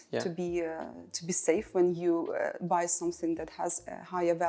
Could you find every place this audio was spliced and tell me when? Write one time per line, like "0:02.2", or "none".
none